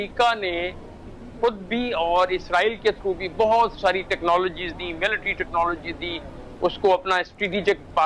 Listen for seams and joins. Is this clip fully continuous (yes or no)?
yes